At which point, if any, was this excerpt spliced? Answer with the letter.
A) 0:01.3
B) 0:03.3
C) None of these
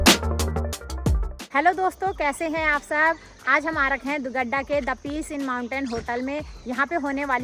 C